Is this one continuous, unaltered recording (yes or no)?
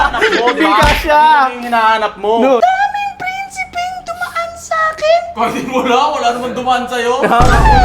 no